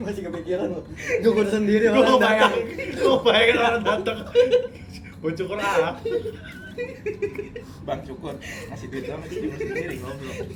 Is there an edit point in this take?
no; 0 cuts

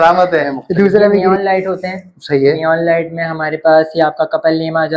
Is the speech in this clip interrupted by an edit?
yes; 1 cut; at 1.4 s

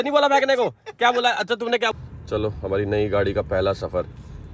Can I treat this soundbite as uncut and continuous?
no; 1 cut; at 1.9 s

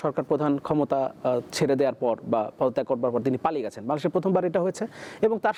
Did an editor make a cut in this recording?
no; 0 cuts

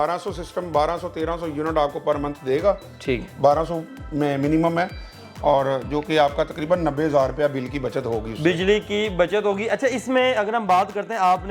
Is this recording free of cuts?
yes; 0 cuts

